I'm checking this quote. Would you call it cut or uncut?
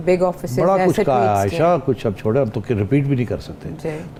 uncut